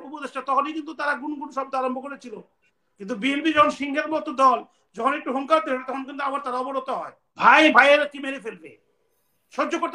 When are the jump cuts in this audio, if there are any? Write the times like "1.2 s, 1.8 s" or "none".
7.2 s